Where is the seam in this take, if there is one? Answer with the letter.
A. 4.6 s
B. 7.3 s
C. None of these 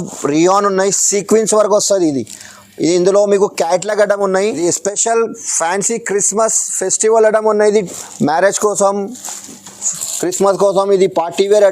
A